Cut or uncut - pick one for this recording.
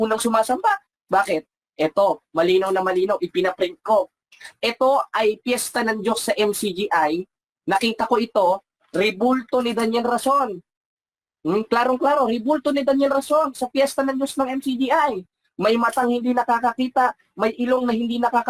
uncut